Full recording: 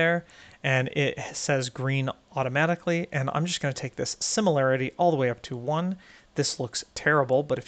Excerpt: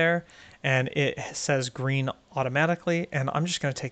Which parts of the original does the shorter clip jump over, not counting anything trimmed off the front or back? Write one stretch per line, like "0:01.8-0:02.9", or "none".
none